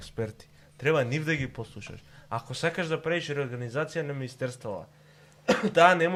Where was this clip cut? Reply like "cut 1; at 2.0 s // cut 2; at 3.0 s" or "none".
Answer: none

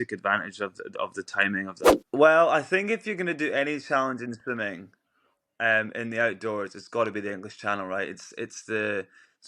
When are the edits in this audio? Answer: cut 1; at 2.0 s

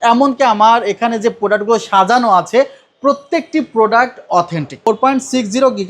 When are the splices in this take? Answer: cut 1; at 4.9 s

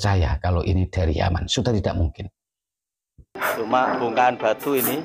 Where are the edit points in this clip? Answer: cut 1; at 3.3 s

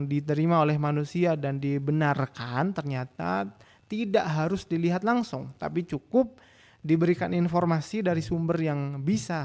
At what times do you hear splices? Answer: none

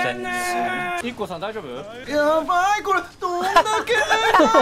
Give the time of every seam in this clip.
cut 1; at 1.0 s // cut 2; at 2.0 s

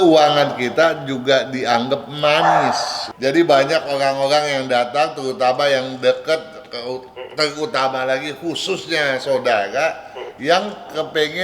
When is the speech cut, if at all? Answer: cut 1; at 3.0 s

